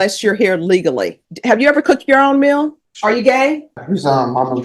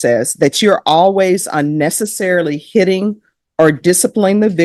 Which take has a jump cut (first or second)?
first